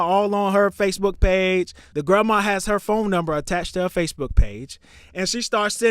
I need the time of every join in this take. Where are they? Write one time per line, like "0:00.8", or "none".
0:01.8